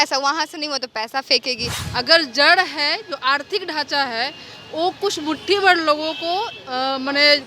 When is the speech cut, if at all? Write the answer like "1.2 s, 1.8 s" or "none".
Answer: 1.7 s